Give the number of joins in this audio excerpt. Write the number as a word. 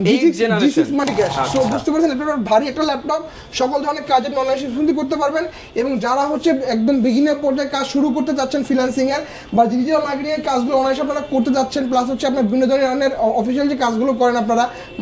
one